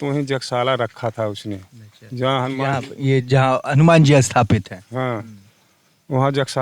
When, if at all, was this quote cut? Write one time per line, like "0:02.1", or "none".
none